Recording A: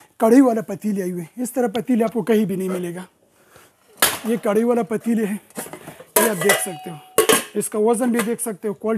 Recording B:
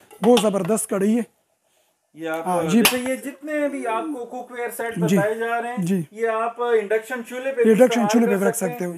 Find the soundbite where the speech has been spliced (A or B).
B